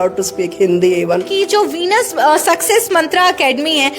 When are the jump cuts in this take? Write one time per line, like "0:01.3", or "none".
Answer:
0:01.3